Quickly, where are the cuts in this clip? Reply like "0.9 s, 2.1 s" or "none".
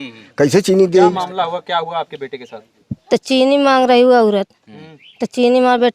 1.2 s